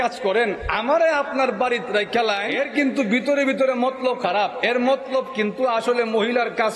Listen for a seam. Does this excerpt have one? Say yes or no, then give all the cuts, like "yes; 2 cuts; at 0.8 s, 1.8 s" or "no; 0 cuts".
yes; 1 cut; at 2.5 s